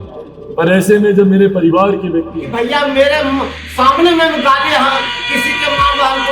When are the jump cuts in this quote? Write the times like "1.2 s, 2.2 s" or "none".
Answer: 2.4 s